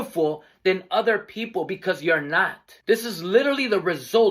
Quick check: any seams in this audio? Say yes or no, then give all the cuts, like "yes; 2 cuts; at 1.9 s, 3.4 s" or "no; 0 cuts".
no; 0 cuts